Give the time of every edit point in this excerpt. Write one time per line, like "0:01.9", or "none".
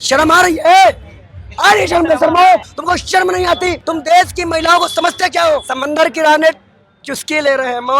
0:02.7
0:03.8
0:05.7